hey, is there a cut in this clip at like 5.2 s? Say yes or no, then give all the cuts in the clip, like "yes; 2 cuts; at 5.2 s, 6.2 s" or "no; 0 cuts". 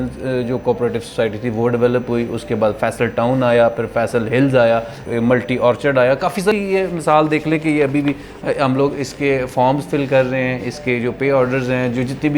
no; 1 cut; at 6.5 s